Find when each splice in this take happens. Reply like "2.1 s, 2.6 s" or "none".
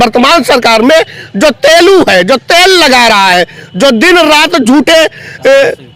none